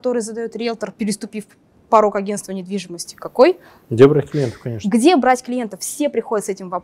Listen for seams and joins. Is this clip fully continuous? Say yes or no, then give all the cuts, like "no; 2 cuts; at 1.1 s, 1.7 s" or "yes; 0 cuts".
yes; 0 cuts